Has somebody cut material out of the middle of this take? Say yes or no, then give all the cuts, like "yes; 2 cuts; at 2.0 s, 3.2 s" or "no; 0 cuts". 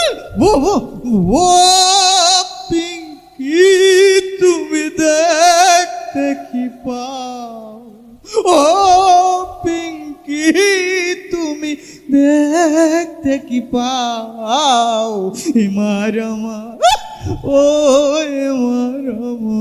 no; 0 cuts